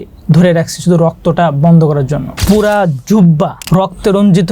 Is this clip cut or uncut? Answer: cut